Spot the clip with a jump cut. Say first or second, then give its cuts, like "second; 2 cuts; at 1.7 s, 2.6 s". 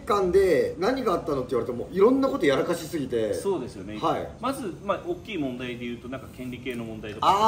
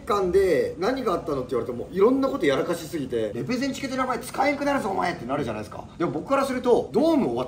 second; 1 cut; at 3.3 s